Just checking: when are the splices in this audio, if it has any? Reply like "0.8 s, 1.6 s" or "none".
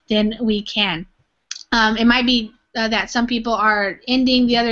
2.9 s

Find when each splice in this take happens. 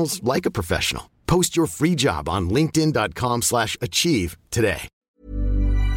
4.9 s

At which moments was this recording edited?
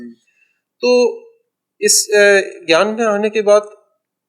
none

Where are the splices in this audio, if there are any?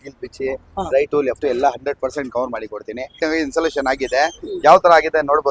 3.2 s

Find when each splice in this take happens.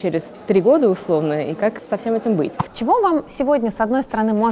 1.8 s, 2.6 s

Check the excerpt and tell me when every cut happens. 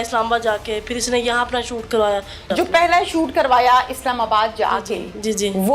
2.4 s

